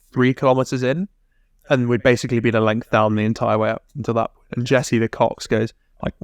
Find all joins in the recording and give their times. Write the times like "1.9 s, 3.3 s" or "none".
none